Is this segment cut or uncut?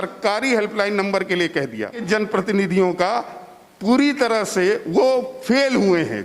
cut